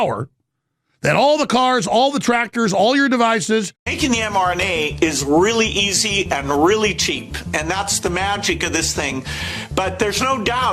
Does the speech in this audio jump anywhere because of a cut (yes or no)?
yes